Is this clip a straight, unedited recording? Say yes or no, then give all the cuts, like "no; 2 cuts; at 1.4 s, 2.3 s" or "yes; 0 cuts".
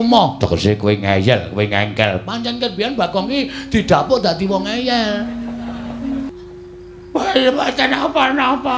no; 1 cut; at 6.2 s